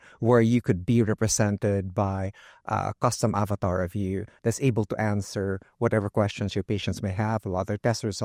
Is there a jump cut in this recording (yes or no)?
no